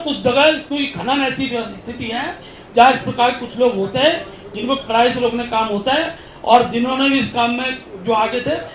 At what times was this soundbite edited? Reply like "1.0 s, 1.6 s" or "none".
none